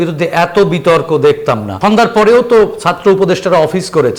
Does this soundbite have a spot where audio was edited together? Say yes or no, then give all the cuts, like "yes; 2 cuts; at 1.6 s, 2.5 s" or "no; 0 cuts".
yes; 1 cut; at 1.7 s